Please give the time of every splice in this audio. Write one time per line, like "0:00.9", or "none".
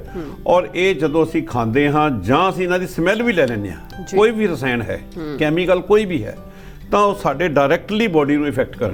none